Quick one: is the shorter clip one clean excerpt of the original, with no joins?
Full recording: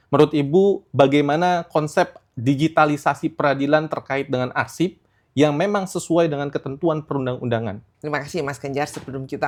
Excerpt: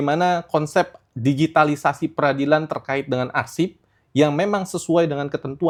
yes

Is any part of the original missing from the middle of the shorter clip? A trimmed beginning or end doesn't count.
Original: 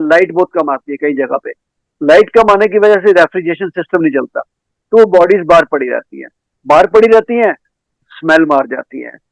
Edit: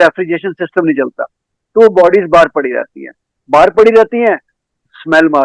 no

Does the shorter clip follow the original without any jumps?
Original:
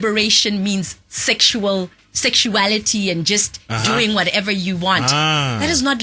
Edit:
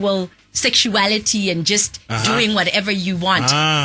yes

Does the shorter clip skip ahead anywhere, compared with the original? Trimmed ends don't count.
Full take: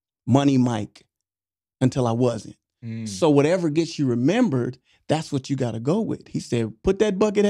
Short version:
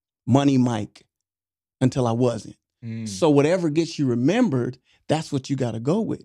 no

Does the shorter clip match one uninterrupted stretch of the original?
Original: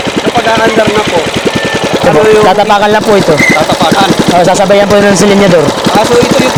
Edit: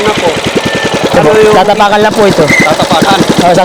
yes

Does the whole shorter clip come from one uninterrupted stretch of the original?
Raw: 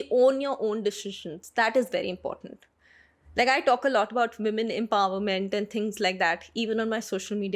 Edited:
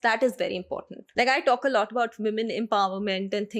no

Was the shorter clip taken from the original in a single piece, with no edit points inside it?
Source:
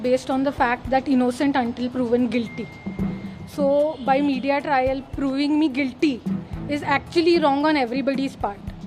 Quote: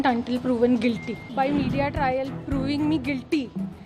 no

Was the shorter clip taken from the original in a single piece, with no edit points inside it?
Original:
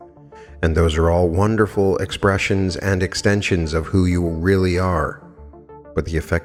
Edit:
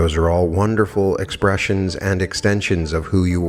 yes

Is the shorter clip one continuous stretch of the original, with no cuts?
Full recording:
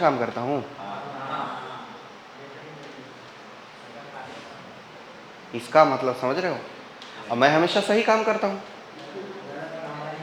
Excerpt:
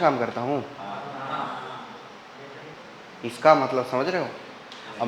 no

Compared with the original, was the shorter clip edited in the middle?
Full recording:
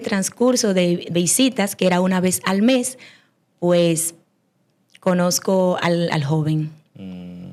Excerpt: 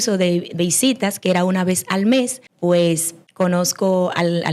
yes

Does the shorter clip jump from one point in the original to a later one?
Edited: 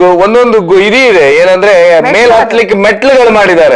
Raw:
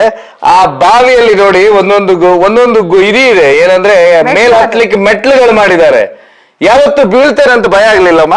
no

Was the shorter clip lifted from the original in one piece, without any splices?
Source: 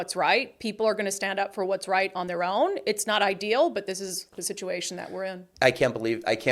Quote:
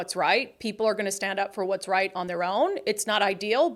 yes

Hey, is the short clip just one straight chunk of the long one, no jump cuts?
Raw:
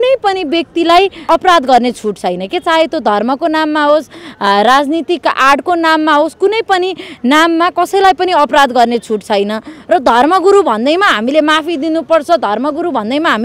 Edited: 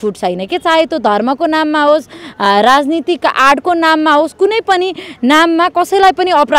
yes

